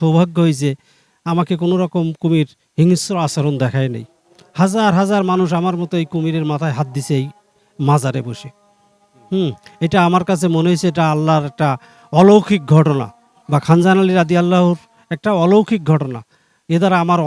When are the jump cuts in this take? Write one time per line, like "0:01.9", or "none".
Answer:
none